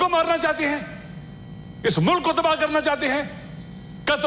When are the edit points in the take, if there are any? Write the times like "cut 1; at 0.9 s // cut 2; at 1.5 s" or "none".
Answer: none